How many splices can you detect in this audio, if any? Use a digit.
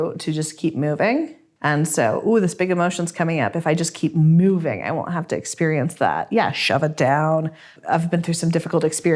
1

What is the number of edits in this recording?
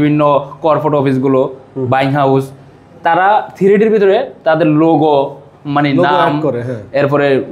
0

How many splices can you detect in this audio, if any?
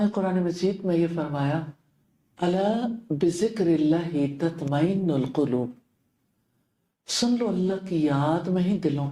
0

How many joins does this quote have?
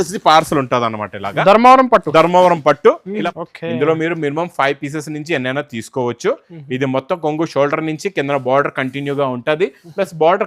1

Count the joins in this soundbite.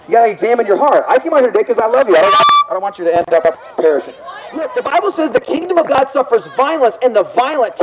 1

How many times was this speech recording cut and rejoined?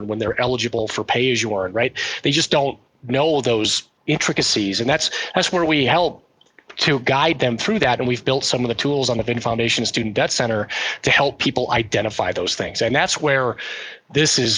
2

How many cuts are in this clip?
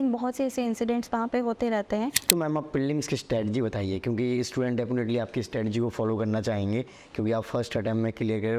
1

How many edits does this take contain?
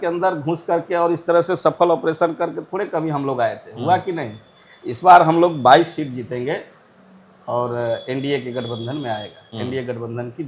0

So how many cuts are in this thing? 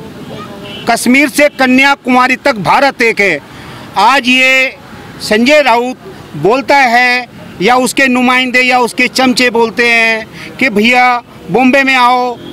0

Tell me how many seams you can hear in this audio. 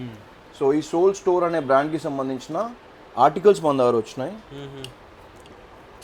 0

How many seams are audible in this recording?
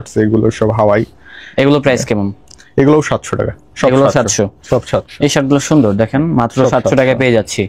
0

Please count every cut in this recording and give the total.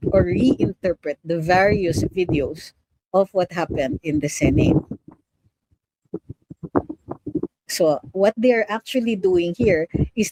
0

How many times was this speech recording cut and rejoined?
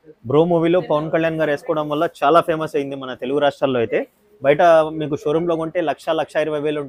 0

